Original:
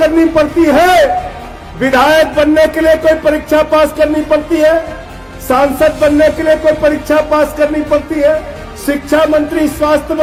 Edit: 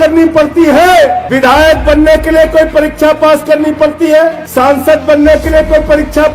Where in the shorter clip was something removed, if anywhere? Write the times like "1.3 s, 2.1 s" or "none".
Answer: 1.2 s, 4.4 s